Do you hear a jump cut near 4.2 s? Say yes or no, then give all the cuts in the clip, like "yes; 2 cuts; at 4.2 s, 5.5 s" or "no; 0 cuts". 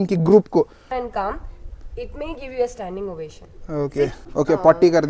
yes; 2 cuts; at 1.0 s, 4.2 s